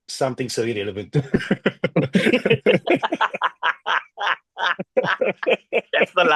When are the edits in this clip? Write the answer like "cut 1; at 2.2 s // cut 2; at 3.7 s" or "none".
none